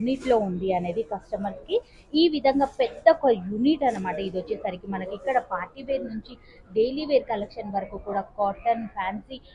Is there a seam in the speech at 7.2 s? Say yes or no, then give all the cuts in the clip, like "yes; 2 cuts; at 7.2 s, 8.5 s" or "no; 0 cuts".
no; 0 cuts